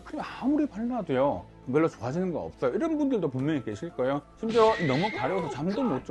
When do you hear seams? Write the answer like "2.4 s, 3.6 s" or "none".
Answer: 1.6 s, 4.3 s